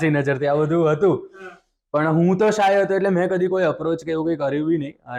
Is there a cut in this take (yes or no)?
no